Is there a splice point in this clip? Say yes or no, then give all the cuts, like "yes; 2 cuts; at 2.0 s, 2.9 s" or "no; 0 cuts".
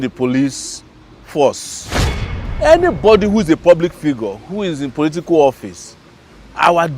yes; 1 cut; at 2.2 s